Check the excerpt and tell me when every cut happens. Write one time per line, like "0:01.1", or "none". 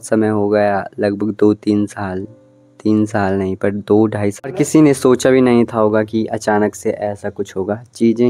0:04.4

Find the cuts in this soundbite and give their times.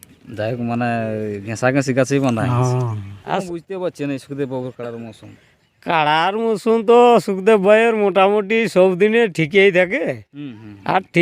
0:03.3

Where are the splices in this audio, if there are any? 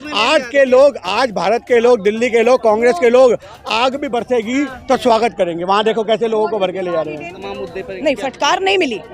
0:07.4

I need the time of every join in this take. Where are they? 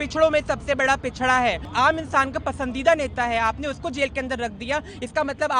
0:01.7

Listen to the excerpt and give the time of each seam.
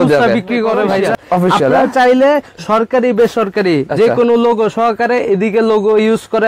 0:01.1

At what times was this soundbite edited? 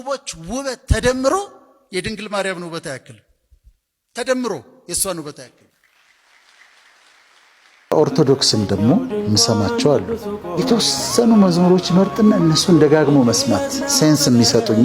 0:07.9

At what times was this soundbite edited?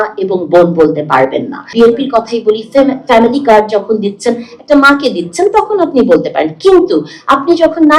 0:01.7

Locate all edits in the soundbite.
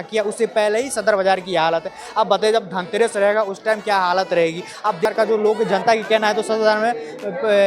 0:05.1

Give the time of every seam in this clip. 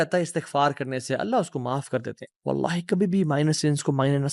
0:02.2

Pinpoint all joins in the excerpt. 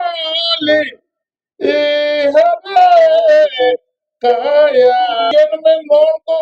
0:05.3

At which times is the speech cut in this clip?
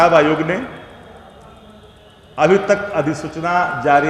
none

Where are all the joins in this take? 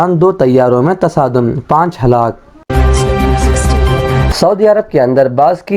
0:02.7
0:04.3

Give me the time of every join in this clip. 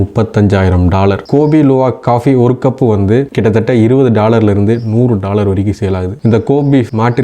0:01.2
0:06.1

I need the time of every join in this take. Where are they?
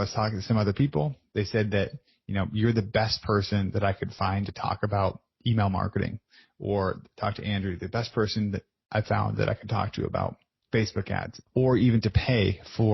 0:10.5
0:11.4

